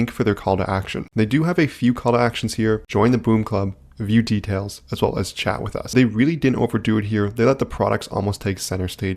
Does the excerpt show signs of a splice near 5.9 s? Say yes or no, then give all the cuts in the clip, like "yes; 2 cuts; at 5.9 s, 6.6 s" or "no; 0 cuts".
yes; 1 cut; at 5.9 s